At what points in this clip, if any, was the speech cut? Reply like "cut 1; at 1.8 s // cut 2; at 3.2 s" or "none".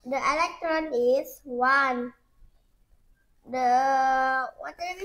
none